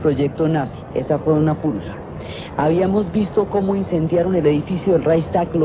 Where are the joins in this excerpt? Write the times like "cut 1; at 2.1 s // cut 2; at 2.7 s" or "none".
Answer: cut 1; at 1.5 s